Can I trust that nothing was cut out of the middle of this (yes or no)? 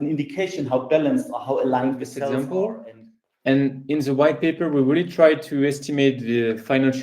no